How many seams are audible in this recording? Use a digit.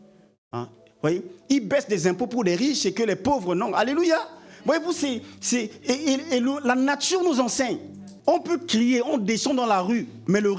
1